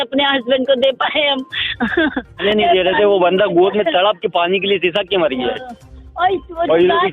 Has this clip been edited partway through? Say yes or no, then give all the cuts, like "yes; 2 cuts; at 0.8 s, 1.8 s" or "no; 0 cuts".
yes; 1 cut; at 2.4 s